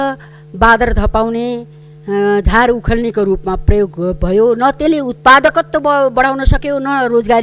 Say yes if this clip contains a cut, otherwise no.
no